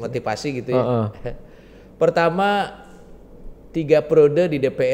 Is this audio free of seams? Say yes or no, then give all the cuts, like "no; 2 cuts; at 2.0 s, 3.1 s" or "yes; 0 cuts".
yes; 0 cuts